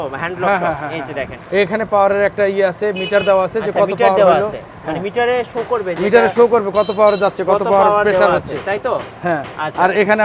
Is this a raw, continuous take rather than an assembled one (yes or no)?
no